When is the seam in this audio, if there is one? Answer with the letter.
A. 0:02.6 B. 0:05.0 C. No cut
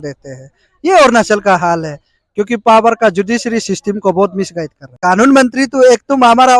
B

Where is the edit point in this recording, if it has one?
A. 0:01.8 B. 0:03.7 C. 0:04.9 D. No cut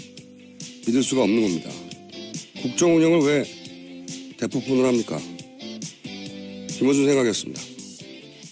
D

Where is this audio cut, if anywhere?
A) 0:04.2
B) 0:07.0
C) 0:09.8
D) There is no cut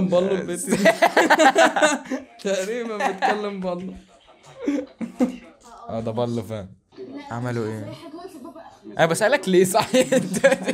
B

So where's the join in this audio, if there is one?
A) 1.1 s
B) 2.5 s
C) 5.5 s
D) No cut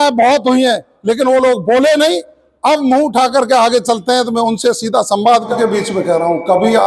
C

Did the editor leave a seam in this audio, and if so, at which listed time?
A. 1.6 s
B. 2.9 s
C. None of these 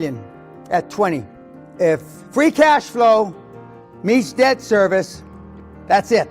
A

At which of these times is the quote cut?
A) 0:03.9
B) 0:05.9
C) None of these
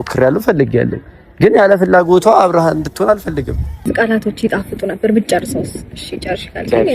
A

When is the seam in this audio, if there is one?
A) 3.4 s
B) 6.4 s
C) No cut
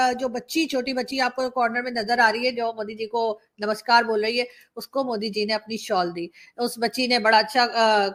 C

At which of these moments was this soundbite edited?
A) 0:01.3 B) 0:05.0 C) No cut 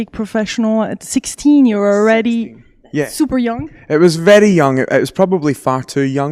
B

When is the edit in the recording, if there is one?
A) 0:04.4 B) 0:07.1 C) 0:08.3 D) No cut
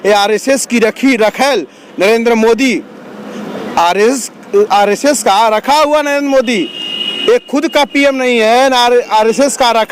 D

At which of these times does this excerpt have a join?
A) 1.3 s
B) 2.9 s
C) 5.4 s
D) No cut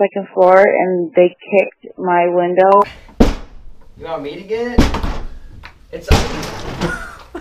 B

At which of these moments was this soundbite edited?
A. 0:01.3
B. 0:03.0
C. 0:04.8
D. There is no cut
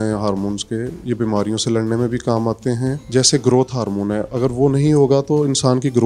B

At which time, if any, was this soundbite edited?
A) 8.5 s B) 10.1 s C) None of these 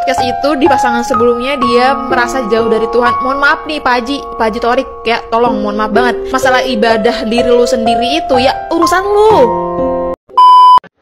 B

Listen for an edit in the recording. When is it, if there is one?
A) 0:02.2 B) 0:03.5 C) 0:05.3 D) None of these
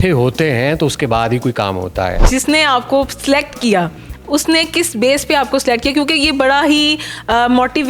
A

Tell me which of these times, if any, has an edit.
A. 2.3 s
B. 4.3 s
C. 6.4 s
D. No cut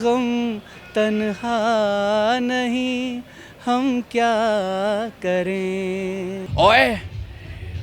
C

